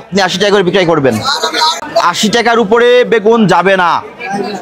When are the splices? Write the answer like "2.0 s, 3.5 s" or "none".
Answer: 1.8 s